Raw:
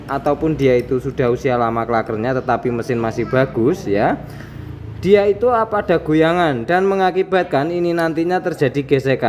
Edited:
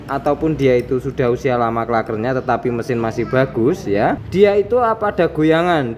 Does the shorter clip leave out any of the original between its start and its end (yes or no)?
yes